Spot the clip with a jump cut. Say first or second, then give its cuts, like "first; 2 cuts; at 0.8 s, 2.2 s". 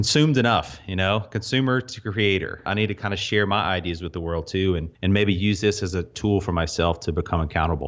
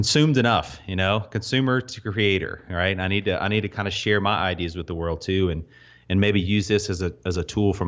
first; 3 cuts; at 2.7 s, 4.9 s, 6.1 s